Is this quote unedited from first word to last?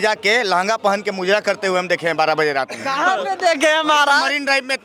yes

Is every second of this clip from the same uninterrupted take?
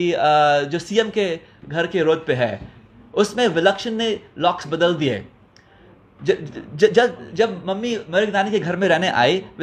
yes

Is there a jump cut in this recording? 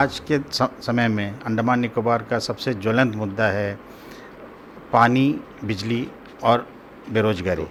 no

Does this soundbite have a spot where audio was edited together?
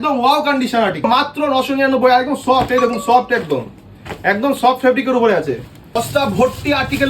yes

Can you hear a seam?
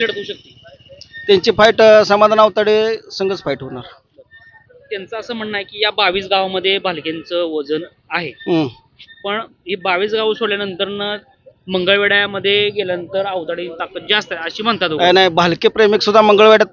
no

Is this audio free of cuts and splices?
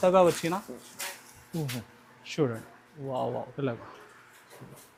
yes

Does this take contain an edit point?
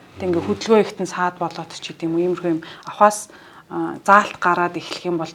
no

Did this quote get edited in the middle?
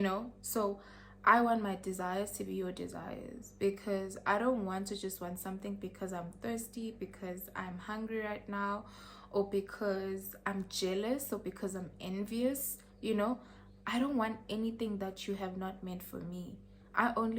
no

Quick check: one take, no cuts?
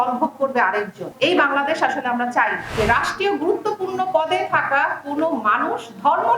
no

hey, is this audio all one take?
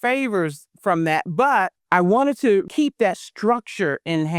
no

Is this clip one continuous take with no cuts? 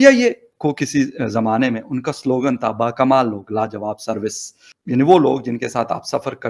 yes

